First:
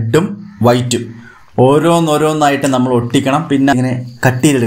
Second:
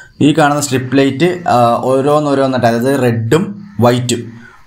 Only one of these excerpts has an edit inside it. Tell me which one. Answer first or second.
first